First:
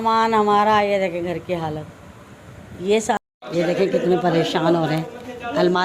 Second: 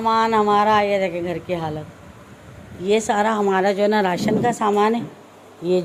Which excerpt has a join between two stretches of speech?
first; 1 cut; at 3.2 s

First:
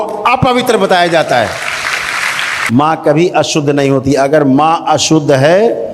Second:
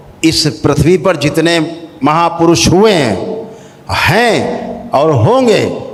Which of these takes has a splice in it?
first; 1 cut; at 2.5 s

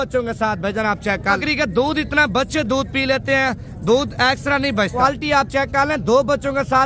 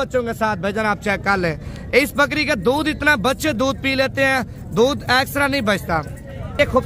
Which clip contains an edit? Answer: first; 2 cuts; at 1.4 s, 5.0 s

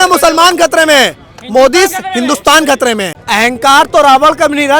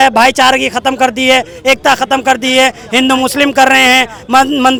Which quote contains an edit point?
first; 1 cut; at 3.1 s

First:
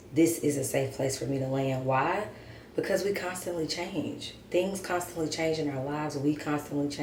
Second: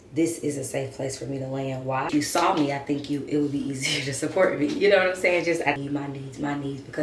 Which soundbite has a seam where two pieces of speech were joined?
second; 2 cuts; at 2.1 s, 5.8 s

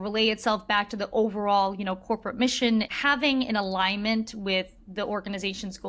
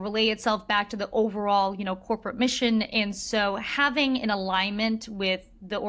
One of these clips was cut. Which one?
first; 1 cut; at 2.9 s

